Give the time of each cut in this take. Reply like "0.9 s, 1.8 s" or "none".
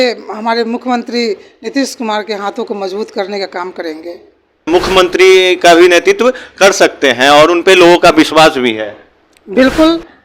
4.7 s